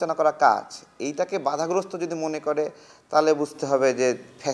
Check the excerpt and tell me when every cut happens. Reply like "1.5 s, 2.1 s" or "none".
none